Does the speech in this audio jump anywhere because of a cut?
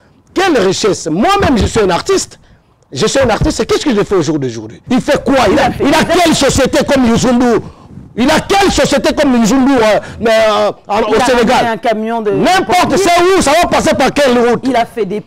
yes; 1 cut; at 4.7 s

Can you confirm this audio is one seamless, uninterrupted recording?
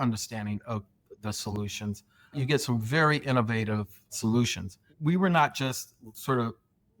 no; 3 cuts; at 2.3 s, 4.1 s, 4.8 s

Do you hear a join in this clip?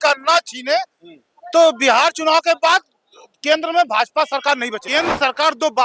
yes; 1 cut; at 4.8 s

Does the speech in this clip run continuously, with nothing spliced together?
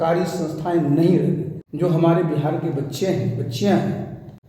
no; 1 cut; at 1.6 s

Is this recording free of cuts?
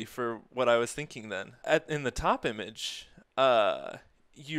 no; 1 cut; at 1.5 s

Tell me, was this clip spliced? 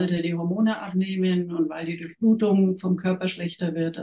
no; 0 cuts

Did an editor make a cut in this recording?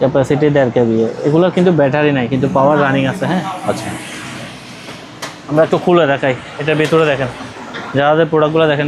no; 0 cuts

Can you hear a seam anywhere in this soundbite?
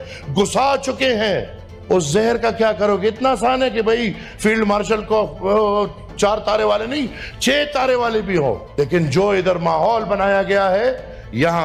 no; 0 cuts

